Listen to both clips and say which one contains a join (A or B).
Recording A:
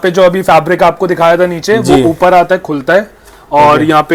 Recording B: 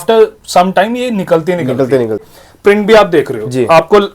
B